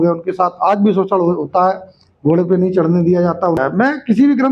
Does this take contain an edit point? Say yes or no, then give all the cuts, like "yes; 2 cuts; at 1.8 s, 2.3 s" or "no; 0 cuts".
yes; 1 cut; at 3.6 s